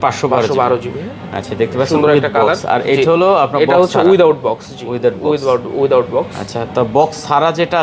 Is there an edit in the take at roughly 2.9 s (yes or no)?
no